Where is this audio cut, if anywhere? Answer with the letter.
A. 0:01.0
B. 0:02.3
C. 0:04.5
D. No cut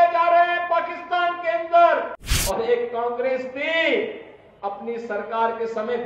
B